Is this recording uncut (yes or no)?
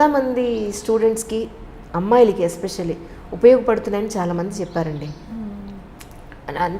yes